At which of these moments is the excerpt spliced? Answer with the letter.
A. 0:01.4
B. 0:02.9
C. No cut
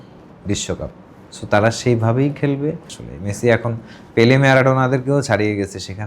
B